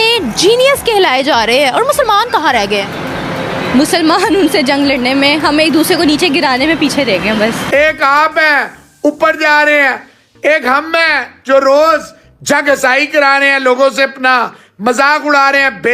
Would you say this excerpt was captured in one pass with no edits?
no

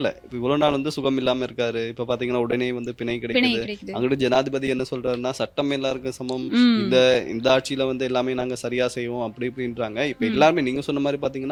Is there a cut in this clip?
no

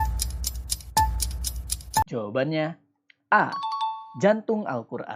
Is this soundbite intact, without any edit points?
no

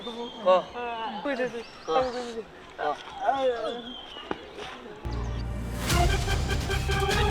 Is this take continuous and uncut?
yes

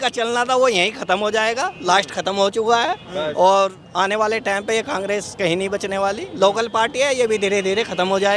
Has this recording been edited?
no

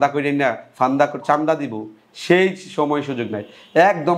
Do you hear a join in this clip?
no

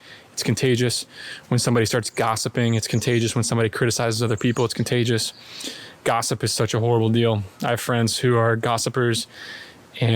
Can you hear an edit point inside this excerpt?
no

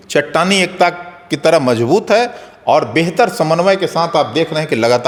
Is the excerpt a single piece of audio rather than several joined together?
yes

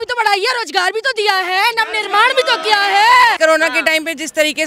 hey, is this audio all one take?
no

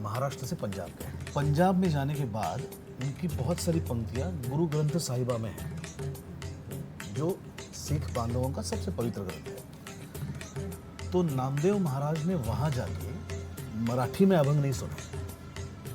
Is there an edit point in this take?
yes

